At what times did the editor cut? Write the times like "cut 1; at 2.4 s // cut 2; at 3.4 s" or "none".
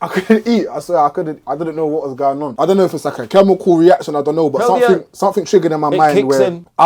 cut 1; at 2.5 s